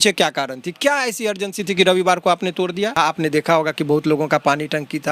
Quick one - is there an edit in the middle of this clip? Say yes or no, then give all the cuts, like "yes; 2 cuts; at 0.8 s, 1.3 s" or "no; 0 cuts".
yes; 1 cut; at 3.0 s